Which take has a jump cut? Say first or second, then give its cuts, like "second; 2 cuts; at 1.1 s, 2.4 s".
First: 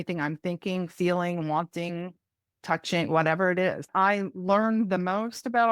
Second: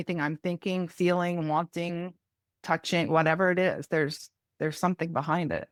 first; 1 cut; at 3.9 s